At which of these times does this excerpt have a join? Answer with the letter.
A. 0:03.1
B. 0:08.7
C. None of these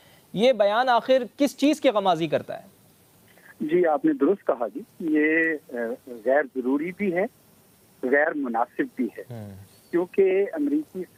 C